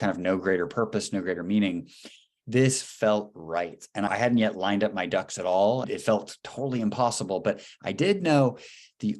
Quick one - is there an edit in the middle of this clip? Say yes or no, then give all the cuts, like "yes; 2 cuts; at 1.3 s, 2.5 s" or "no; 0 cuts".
yes; 2 cuts; at 4.1 s, 5.8 s